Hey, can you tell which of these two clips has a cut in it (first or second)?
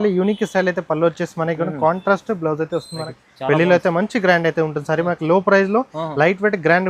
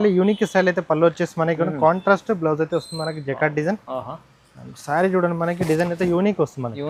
first